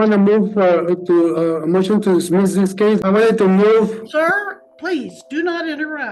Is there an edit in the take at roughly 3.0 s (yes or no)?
yes